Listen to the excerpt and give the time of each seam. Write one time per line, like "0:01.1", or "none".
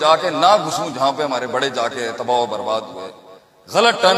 none